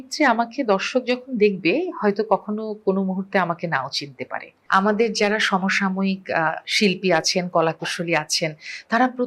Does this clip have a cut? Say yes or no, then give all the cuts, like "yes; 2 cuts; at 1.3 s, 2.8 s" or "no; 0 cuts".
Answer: yes; 1 cut; at 4.5 s